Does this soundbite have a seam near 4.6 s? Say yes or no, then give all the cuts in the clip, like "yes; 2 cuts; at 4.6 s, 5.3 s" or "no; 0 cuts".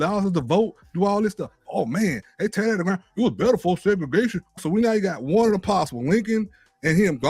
yes; 1 cut; at 4.6 s